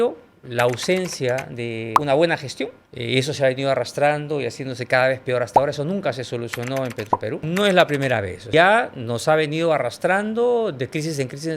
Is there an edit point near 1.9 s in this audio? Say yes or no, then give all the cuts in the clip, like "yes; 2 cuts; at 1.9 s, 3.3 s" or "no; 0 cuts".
yes; 3 cuts; at 1.9 s, 7.4 s, 8.4 s